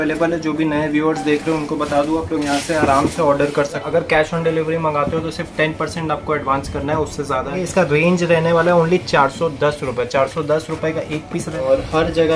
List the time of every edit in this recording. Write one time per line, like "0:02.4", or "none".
0:03.9
0:07.5
0:11.5